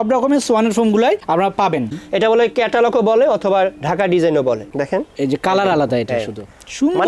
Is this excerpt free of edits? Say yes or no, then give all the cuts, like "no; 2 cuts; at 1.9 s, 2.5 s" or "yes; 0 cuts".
no; 2 cuts; at 1.9 s, 4.7 s